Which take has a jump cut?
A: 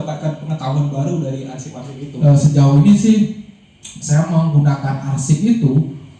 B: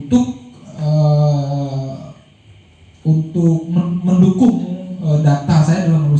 A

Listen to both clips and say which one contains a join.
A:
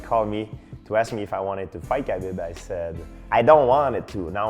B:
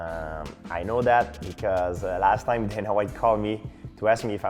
A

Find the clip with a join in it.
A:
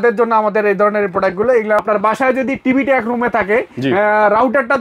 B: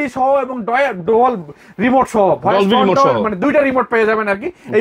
A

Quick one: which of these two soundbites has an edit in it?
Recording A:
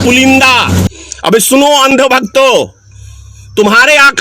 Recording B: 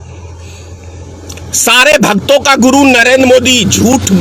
A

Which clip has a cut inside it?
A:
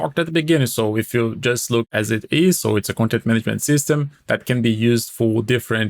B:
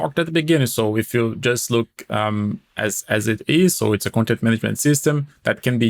A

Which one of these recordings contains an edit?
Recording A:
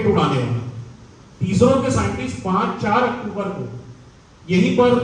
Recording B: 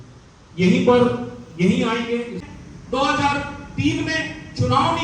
B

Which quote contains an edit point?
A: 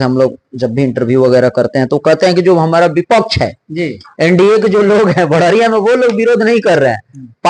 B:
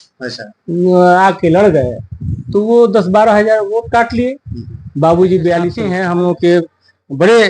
B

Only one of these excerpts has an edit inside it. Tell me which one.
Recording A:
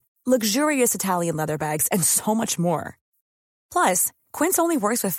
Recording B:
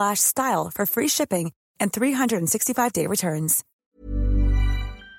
B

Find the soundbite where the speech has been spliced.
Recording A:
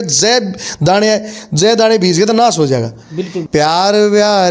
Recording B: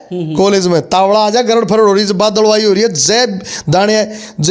A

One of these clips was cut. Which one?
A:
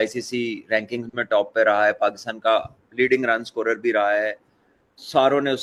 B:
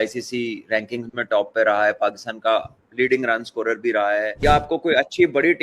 B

